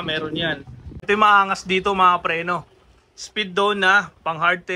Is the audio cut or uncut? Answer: cut